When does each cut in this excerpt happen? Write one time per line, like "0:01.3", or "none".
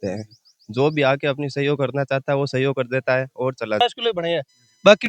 0:03.8

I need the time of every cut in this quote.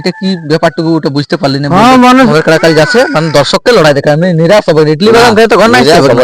0:02.3

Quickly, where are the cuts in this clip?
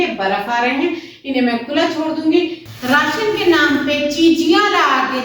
0:02.7

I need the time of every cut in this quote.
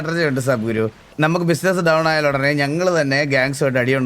0:01.1

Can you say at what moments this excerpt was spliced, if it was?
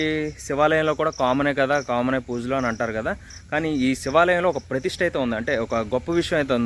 none

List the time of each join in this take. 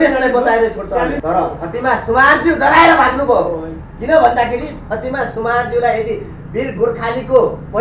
0:01.2

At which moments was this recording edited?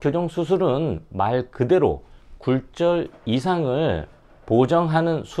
none

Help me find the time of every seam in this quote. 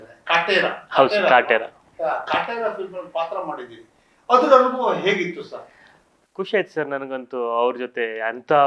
none

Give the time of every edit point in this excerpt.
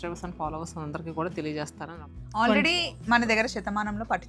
0:01.9

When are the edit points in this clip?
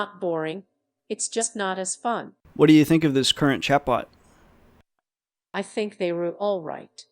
0:02.4

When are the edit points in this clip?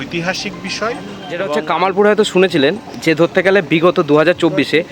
0:01.5

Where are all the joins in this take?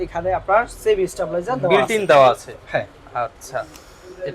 none

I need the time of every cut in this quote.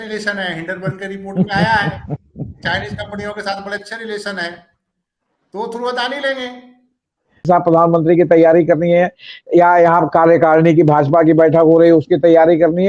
0:07.4

